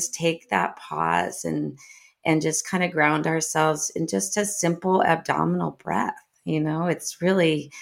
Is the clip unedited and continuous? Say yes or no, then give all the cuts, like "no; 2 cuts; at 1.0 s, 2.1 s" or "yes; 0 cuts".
yes; 0 cuts